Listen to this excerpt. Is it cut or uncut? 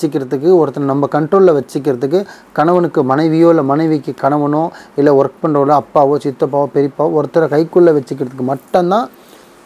uncut